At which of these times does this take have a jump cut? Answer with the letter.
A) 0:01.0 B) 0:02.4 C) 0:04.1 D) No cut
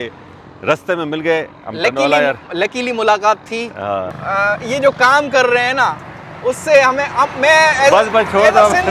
C